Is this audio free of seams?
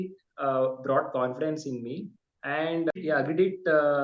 no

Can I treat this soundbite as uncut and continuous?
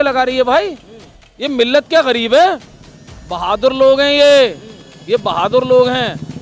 yes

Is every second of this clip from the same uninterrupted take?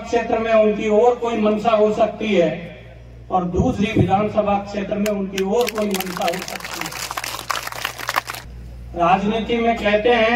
no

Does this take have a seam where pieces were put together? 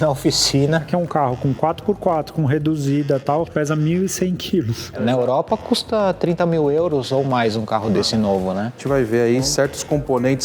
yes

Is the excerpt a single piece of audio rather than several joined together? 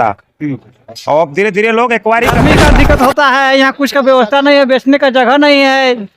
no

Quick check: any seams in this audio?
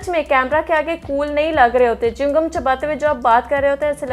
no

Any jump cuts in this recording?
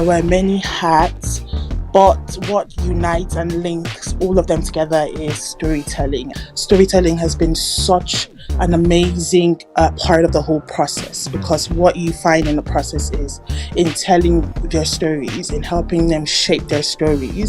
yes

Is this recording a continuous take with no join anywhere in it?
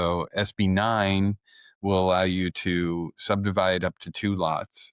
yes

